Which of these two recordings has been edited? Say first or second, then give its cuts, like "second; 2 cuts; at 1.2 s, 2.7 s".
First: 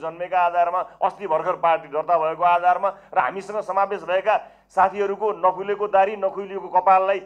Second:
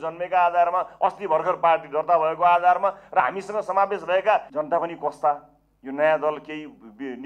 second; 1 cut; at 4.5 s